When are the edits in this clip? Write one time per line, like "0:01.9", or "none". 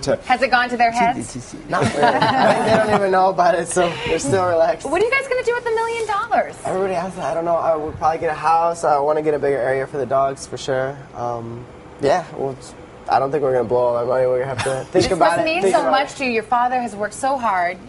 0:15.3